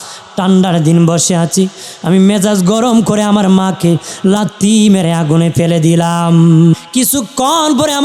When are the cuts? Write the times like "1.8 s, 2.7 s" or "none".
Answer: 6.7 s